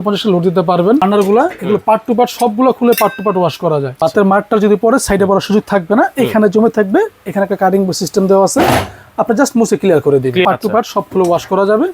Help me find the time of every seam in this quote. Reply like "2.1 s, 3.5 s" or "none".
1.0 s, 3.9 s, 10.4 s